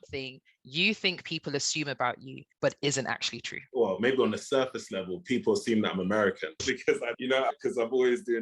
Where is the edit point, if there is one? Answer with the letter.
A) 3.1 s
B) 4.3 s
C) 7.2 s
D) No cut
C